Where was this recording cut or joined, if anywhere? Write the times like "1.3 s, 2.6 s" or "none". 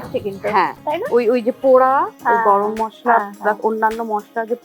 none